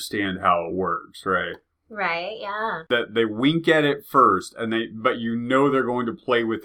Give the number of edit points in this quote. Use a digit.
1